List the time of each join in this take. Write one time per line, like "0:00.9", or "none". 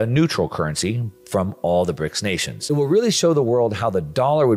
0:02.6